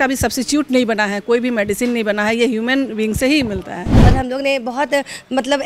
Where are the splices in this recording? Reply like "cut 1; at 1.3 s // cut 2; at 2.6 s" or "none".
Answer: cut 1; at 3.9 s